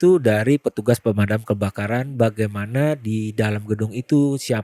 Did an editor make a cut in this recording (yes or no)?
no